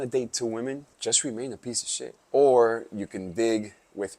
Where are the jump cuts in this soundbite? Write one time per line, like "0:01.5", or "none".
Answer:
0:00.9
0:02.2